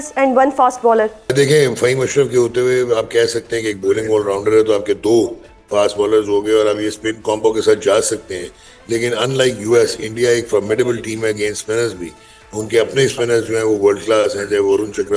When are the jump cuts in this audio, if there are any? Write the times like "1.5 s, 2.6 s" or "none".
1.3 s